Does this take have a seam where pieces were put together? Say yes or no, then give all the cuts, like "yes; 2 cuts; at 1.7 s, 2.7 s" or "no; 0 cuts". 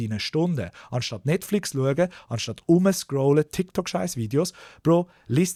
no; 0 cuts